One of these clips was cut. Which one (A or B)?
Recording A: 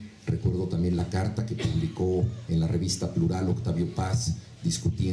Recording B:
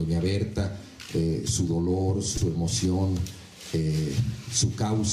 B